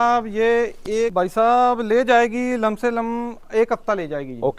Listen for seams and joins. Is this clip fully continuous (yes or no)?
no